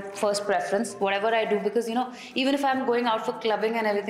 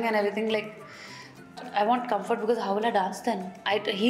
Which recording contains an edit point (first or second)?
second